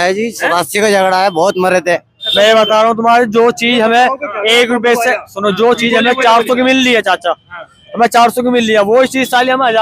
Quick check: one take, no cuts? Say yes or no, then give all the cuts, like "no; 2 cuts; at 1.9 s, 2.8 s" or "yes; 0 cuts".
no; 1 cut; at 2.3 s